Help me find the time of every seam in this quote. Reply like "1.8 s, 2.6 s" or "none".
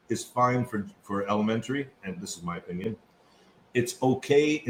none